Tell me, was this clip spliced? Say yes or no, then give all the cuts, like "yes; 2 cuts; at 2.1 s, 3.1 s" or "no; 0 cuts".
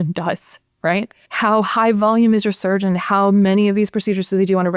yes; 1 cut; at 1.2 s